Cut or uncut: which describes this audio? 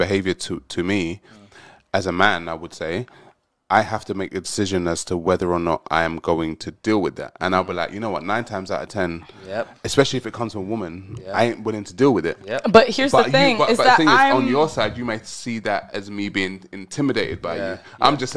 cut